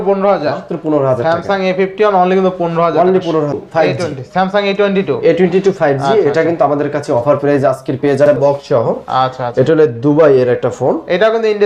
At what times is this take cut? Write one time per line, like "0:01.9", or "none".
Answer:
0:03.6
0:08.3